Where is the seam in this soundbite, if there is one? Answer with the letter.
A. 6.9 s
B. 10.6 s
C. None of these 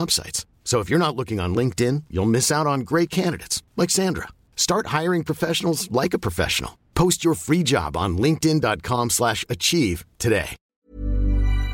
B